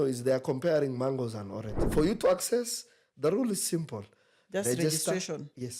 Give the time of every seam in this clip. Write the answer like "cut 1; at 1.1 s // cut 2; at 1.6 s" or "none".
cut 1; at 1.8 s